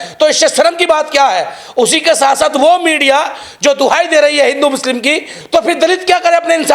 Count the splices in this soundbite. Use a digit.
0